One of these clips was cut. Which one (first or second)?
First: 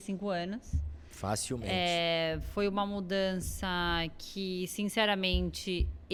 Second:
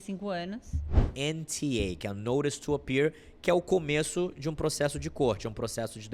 second